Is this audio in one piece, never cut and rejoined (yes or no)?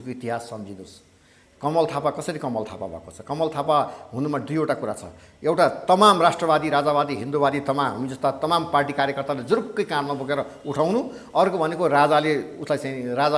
yes